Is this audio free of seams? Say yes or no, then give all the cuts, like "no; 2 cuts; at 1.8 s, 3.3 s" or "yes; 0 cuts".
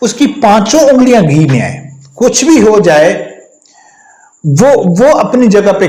yes; 0 cuts